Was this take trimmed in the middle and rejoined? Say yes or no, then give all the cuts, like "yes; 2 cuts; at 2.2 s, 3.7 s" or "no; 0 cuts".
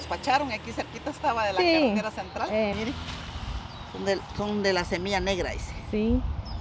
yes; 1 cut; at 2.7 s